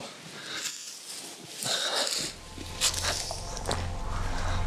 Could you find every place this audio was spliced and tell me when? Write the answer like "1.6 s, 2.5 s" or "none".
none

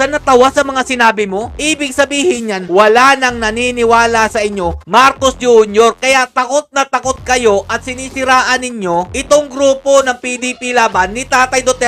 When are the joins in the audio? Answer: none

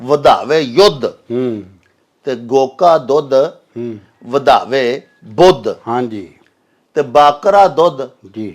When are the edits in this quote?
none

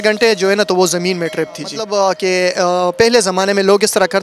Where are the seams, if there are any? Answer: 1.8 s

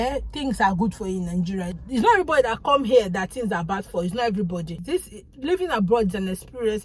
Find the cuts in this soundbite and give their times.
1.7 s, 4.8 s

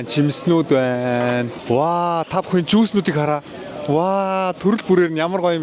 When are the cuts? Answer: none

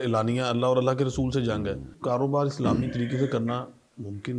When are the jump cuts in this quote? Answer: 1.9 s

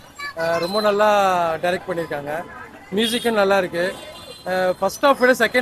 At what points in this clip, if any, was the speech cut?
none

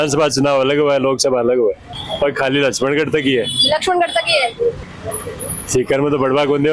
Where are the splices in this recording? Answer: 1.9 s, 4.8 s

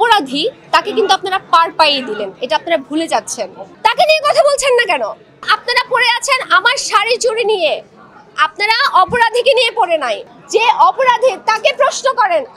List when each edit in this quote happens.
3.7 s, 5.4 s, 10.3 s

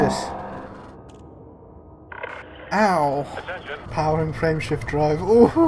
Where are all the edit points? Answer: 3.8 s

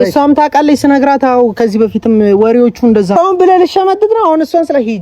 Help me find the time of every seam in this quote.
3.2 s

